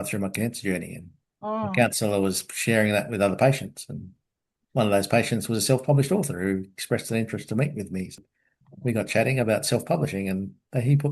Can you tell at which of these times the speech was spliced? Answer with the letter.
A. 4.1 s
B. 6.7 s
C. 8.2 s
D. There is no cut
C